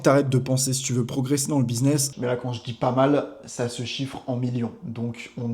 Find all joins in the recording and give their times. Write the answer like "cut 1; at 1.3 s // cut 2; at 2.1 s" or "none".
cut 1; at 2.1 s